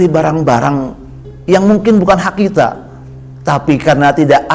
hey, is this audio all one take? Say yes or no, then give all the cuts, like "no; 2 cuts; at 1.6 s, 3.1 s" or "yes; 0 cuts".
yes; 0 cuts